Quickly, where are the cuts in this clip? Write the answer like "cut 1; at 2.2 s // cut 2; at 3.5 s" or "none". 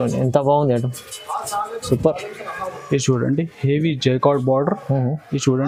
none